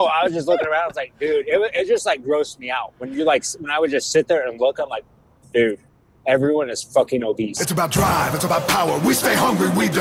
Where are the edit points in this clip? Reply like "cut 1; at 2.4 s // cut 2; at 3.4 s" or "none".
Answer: cut 1; at 7.6 s